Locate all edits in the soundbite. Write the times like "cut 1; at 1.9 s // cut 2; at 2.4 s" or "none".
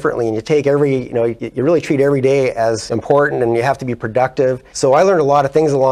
cut 1; at 1.4 s // cut 2; at 2.9 s // cut 3; at 4.7 s